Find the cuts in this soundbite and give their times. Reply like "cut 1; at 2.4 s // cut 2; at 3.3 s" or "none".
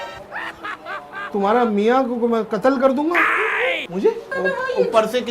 cut 1; at 4.3 s